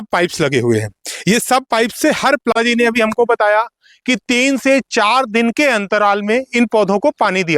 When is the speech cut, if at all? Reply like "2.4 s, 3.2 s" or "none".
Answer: 2.5 s